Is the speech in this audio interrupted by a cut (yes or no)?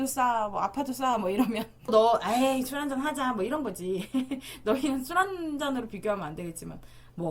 yes